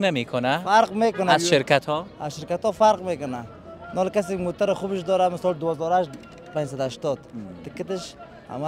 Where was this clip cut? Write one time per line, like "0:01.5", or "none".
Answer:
none

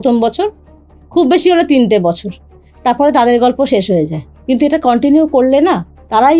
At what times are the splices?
0:04.3

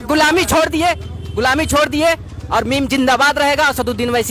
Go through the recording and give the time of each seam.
none

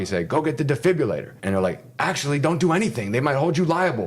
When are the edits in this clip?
0:01.3

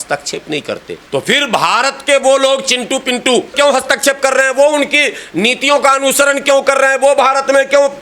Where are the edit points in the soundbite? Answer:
0:00.9
0:03.5

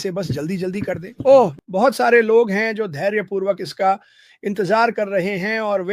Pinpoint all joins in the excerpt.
0:01.6

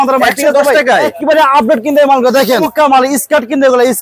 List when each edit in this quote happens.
0:01.1
0:02.7

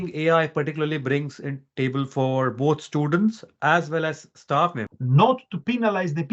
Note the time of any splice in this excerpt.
0:04.9

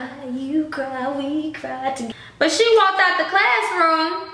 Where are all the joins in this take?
0:02.1

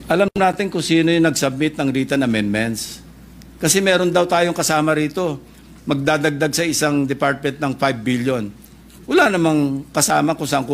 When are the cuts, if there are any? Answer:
none

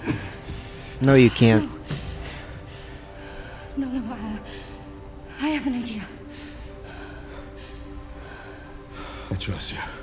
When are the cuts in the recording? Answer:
none

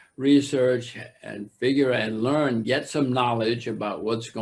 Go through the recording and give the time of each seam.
none

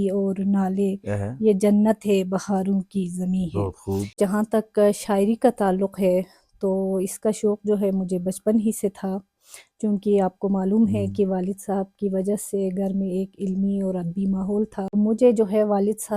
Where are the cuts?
0:04.2
0:14.9

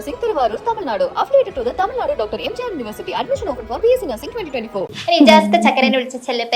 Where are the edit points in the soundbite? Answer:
0:04.9

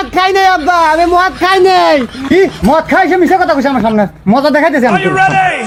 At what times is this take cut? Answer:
none

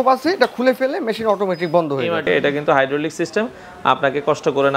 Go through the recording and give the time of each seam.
0:02.2

